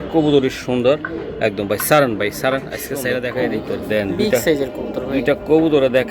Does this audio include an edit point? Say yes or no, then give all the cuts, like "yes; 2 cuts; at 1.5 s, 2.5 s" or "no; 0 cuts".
yes; 1 cut; at 3.3 s